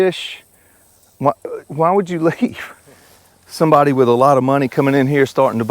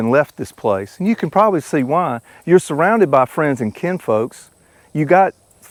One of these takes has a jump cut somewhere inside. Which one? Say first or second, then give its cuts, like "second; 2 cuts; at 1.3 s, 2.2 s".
first; 1 cut; at 3.3 s